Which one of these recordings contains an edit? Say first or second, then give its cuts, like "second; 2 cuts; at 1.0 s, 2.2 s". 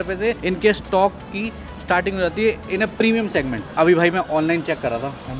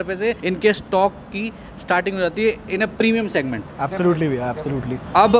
first; 1 cut; at 3.7 s